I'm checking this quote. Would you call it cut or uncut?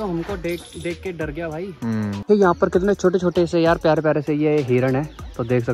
uncut